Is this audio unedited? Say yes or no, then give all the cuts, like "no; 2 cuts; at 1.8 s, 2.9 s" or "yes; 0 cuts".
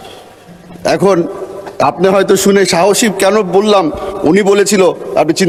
yes; 0 cuts